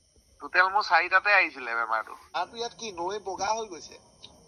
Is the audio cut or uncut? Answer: cut